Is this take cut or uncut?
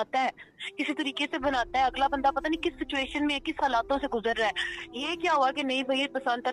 uncut